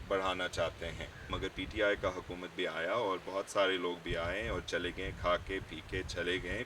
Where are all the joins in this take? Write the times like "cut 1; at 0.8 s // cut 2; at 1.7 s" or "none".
cut 1; at 1.4 s